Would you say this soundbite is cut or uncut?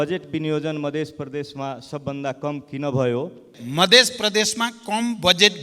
cut